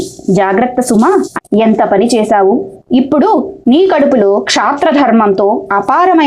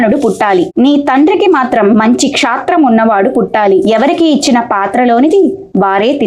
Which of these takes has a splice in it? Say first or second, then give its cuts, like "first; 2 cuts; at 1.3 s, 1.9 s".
first; 1 cut; at 1.3 s